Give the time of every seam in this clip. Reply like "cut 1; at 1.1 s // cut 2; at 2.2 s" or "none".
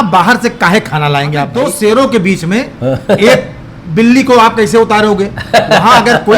cut 1; at 1.5 s